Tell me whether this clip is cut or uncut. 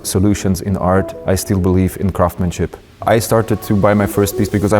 cut